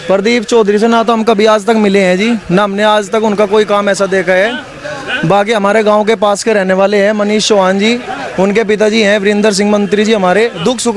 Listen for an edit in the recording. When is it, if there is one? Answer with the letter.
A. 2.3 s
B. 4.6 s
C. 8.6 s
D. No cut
D